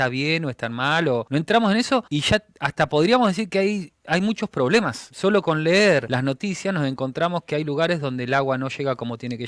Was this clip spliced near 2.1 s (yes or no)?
yes